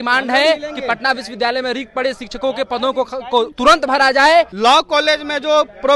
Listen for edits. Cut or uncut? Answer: cut